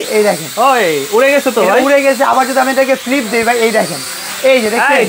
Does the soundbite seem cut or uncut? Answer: uncut